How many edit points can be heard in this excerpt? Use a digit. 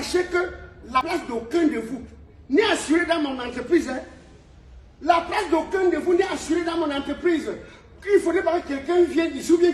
1